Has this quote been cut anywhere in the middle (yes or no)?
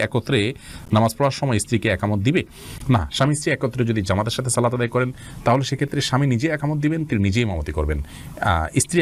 no